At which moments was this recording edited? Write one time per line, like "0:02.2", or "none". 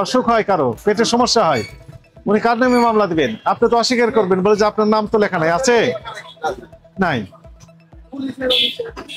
none